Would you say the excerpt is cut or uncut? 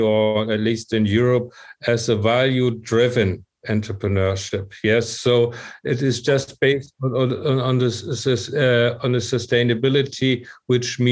uncut